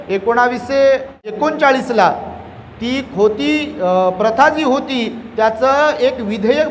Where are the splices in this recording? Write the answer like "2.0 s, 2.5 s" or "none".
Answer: 1.3 s